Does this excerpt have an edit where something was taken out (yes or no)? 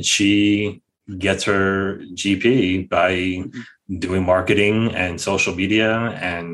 no